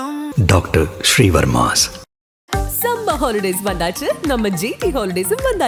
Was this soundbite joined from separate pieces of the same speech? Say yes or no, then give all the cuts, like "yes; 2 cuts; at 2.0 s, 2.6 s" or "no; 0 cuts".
no; 0 cuts